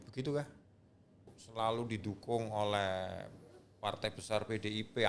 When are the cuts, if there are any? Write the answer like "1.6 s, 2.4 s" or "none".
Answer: 1.4 s